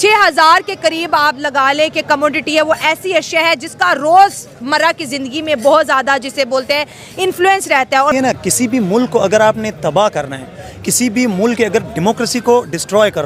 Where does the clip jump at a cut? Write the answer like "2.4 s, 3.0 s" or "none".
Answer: 8.1 s